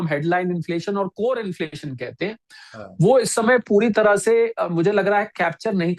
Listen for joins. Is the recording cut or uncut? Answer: uncut